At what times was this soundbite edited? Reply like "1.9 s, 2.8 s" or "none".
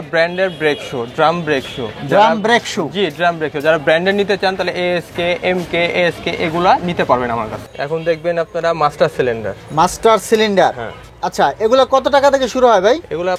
none